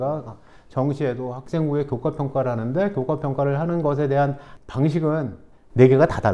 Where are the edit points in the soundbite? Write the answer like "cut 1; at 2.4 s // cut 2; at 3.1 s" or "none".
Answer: none